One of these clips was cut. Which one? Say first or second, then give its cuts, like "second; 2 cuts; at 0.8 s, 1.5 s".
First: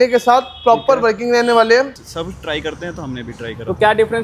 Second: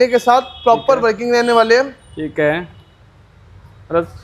first; 1 cut; at 2.0 s